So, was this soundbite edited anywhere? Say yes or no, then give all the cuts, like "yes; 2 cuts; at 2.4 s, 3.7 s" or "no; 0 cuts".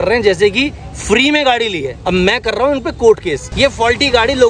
yes; 2 cuts; at 1.9 s, 3.5 s